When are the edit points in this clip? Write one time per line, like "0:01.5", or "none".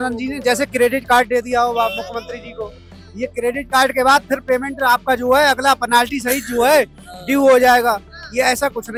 none